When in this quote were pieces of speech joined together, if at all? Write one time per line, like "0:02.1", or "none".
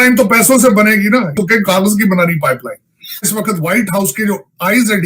0:01.3
0:03.2